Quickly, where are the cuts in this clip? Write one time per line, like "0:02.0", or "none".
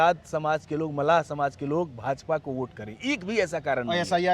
none